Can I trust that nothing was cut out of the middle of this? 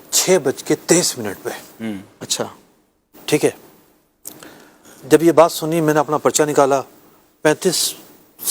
yes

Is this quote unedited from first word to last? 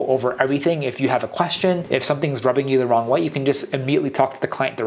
yes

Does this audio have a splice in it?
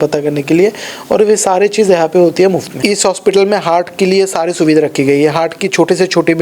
yes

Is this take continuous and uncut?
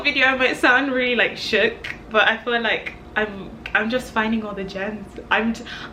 yes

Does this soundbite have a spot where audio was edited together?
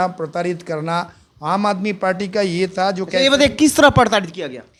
no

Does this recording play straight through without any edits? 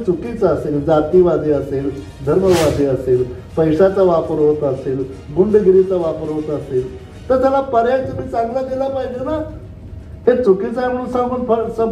yes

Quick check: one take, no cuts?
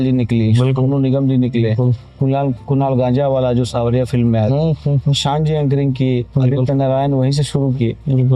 yes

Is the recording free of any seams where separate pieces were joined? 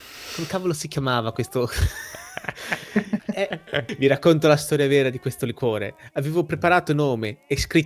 no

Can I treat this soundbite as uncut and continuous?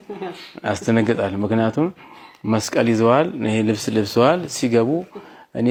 yes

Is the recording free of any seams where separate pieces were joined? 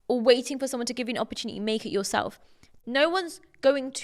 no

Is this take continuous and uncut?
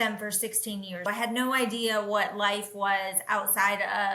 yes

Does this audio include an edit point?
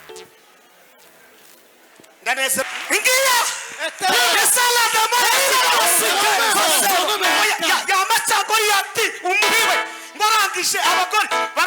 yes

